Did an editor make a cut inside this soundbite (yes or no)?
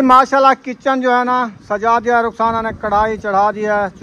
no